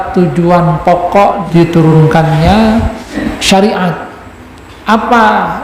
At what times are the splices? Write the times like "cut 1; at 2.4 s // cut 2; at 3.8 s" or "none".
cut 1; at 1.4 s // cut 2; at 3.2 s